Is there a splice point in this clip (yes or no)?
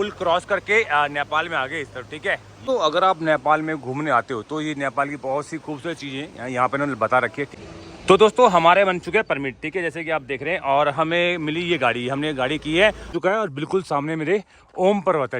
yes